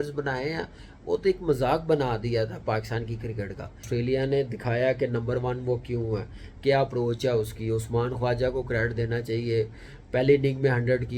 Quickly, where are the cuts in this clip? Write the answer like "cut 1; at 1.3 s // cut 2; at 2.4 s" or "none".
cut 1; at 3.9 s